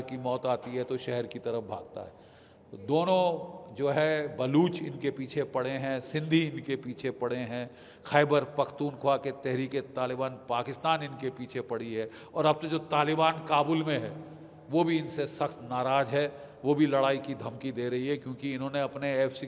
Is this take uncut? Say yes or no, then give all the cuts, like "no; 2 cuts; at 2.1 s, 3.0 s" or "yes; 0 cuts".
yes; 0 cuts